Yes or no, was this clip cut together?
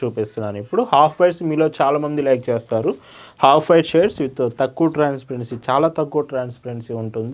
no